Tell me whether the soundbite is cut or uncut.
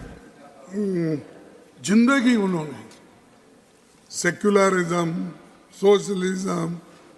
uncut